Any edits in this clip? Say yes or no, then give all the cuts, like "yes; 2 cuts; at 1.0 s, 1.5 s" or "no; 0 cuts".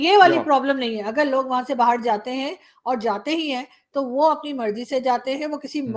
no; 0 cuts